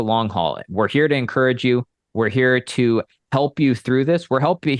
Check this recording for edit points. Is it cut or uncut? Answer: uncut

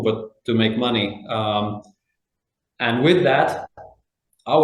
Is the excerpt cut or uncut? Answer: uncut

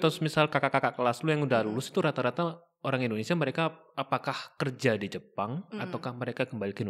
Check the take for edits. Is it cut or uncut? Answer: uncut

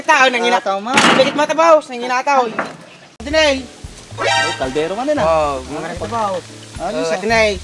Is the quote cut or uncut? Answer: cut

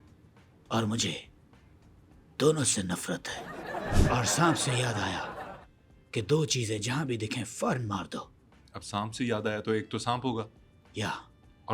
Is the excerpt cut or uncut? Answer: cut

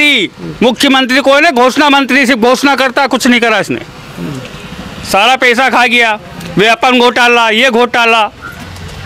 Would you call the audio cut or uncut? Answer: uncut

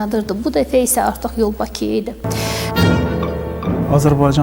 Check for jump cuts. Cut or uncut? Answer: cut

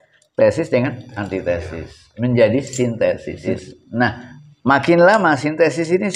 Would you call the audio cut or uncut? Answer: cut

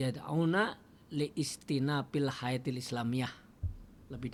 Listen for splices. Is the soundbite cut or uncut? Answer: uncut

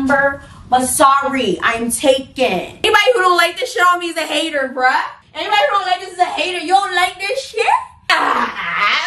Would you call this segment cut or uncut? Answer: cut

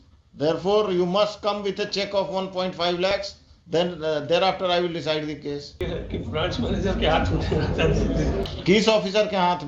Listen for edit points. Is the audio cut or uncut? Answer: cut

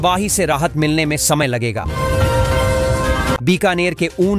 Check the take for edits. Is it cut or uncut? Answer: uncut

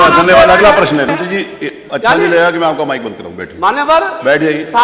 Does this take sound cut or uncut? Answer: cut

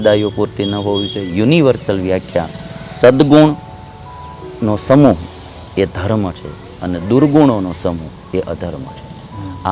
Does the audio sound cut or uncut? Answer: uncut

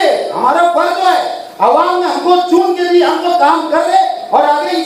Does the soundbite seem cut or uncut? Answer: uncut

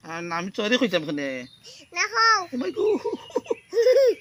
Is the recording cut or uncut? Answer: uncut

